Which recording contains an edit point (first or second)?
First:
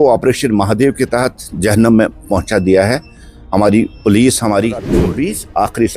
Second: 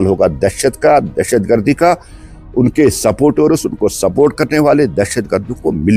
first